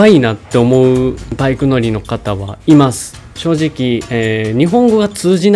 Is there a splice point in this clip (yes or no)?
yes